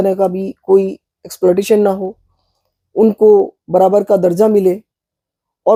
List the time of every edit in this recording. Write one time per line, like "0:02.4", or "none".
none